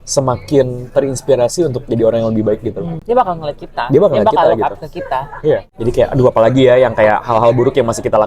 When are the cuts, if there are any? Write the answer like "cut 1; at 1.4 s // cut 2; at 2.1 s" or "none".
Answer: cut 1; at 2.9 s // cut 2; at 5.7 s